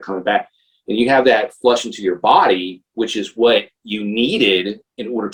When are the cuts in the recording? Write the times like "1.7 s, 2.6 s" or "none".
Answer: none